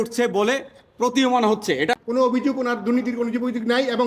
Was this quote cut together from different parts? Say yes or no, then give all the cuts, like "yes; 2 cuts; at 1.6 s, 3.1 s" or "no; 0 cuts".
yes; 1 cut; at 2.0 s